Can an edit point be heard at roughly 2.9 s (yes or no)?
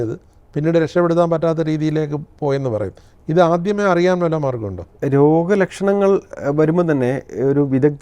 no